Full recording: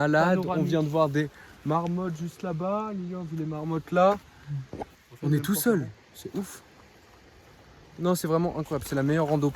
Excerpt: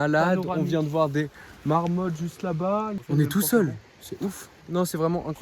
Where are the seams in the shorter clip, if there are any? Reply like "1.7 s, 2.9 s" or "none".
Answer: 3.0 s, 4.5 s